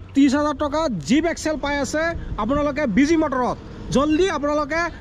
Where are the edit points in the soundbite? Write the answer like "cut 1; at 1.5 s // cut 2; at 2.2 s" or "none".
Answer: none